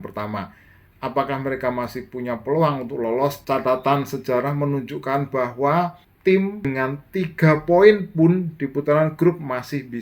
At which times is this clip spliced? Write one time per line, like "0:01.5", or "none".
0:03.4
0:06.1
0:06.7